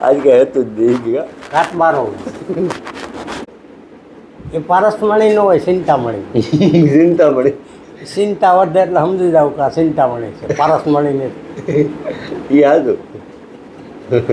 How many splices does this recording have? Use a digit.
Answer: 1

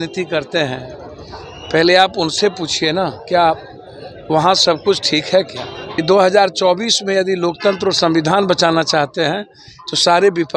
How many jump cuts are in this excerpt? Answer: 1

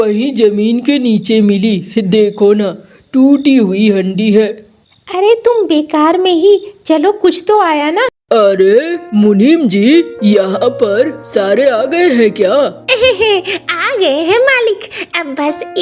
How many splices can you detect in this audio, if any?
1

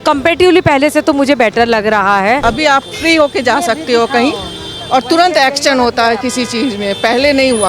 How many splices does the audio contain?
1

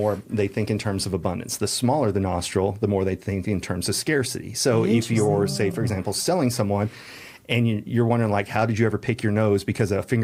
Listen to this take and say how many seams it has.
0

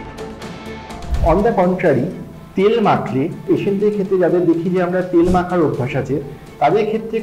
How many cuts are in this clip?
2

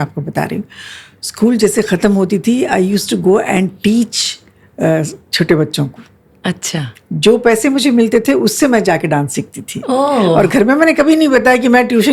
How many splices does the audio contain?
0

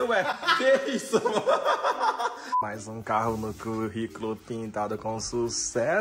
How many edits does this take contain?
1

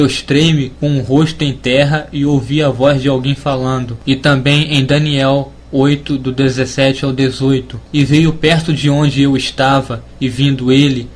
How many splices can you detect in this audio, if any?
1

